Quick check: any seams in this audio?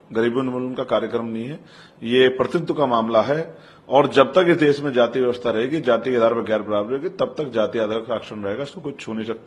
no; 0 cuts

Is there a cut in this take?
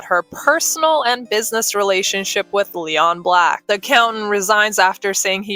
yes; 1 cut; at 3.6 s

